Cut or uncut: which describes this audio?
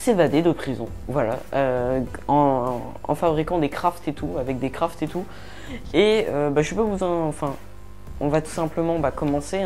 uncut